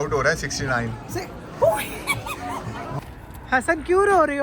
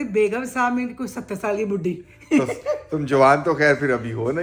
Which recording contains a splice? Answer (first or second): first